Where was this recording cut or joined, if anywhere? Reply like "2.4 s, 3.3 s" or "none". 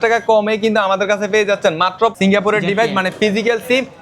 2.1 s